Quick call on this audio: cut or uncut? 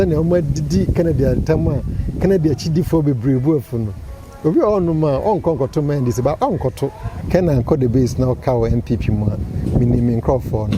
cut